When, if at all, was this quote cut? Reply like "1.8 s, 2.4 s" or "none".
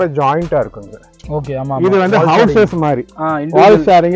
none